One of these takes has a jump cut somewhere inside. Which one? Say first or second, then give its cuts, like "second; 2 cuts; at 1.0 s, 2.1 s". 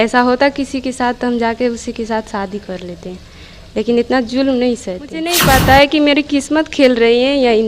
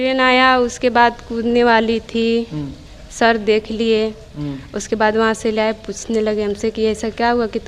first; 1 cut; at 5.3 s